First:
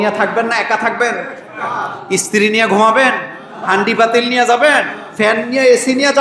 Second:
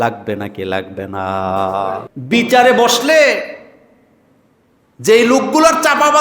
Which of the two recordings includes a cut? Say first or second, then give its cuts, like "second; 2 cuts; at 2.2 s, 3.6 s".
second; 1 cut; at 2.1 s